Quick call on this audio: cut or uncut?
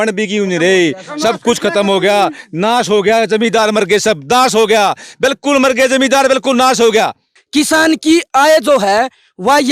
cut